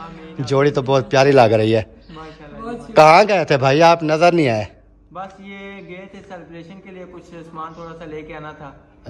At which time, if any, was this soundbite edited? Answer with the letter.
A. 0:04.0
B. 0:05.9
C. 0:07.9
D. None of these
D